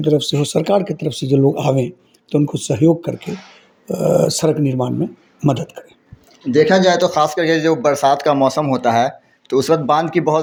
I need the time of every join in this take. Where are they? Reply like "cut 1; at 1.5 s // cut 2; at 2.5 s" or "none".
none